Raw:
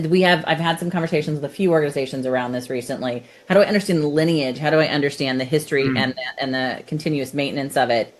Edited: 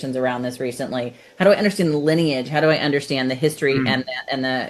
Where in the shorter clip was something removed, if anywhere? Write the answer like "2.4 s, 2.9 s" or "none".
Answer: none